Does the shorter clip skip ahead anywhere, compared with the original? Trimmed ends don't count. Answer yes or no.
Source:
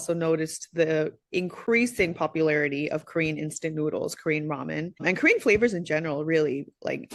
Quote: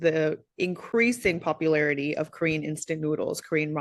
no